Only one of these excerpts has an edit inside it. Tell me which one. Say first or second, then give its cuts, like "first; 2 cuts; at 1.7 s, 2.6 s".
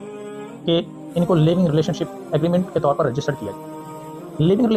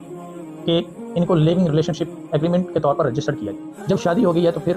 second; 1 cut; at 3.7 s